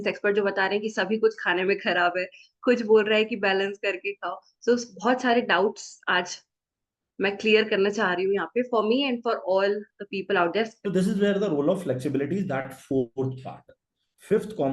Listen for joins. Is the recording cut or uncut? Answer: cut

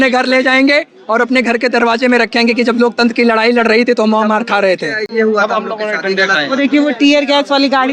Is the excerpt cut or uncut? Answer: uncut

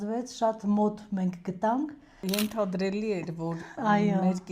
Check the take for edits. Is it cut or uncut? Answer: cut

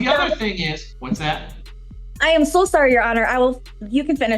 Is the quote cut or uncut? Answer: cut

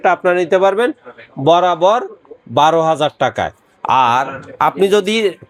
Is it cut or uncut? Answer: uncut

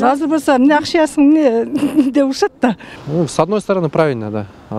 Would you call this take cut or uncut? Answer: cut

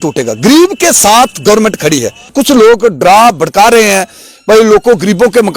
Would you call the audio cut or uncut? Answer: cut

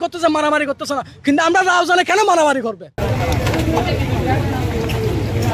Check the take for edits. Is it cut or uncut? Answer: uncut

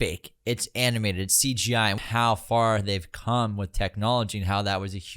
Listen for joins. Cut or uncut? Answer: cut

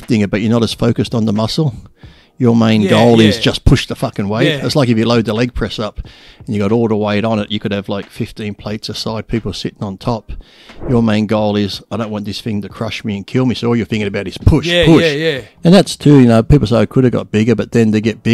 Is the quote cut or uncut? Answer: cut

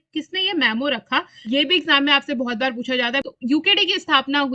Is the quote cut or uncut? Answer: cut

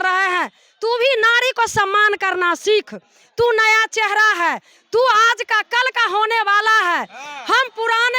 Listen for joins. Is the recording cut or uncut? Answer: uncut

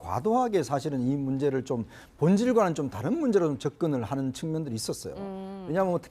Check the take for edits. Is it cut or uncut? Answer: cut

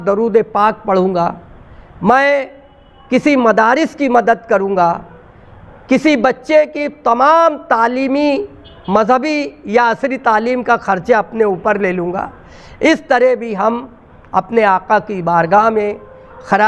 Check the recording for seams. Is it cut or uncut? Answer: uncut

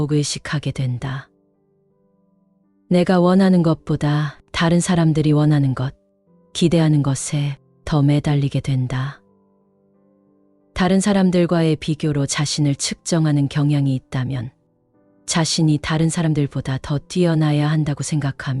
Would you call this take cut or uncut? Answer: cut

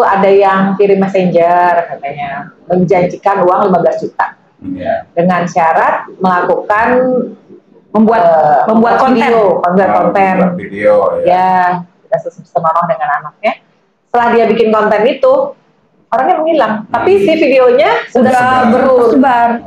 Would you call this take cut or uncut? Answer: uncut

